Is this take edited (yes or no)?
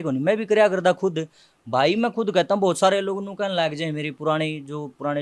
no